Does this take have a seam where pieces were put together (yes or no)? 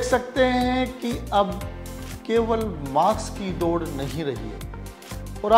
no